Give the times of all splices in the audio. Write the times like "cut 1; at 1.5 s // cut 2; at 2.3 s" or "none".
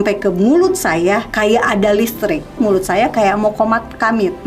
cut 1; at 1.3 s // cut 2; at 2.6 s

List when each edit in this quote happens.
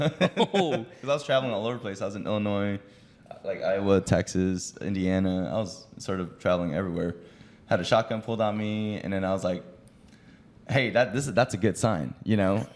none

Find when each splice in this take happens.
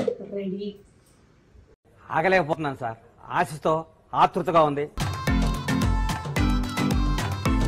none

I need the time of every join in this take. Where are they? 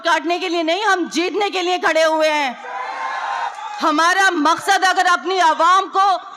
cut 1; at 3.5 s

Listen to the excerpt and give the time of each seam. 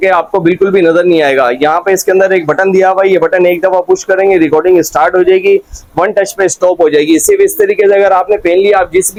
none

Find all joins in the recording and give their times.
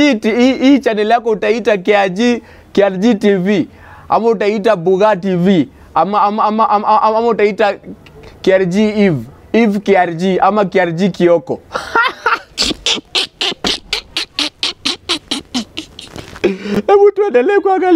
none

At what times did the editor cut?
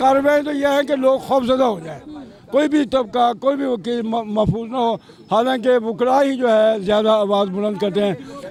none

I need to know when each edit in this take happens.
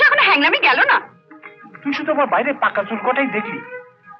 none

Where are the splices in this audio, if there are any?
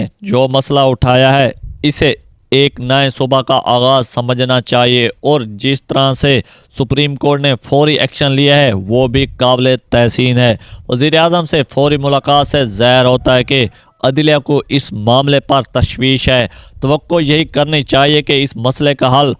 none

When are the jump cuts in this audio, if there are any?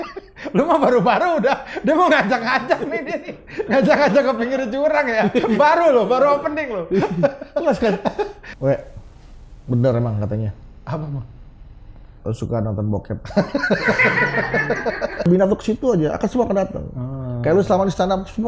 cut 1; at 8.4 s // cut 2; at 15.3 s

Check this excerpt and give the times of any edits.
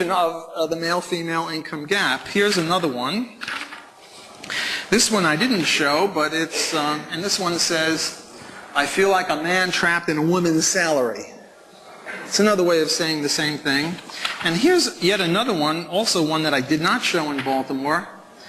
cut 1; at 16.1 s

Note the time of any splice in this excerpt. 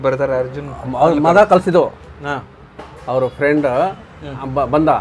none

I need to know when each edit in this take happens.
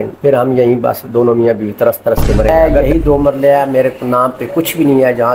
cut 1; at 2.5 s

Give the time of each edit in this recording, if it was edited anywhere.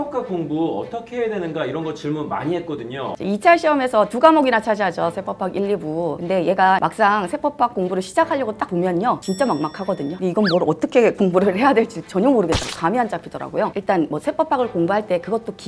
cut 1; at 3.2 s

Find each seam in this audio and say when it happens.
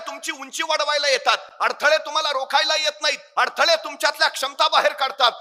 none

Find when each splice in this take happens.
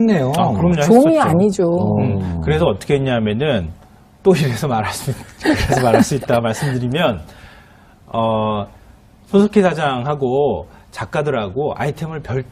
none

